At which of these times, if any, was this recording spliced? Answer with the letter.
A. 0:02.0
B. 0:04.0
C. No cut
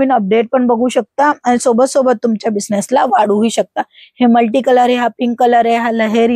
C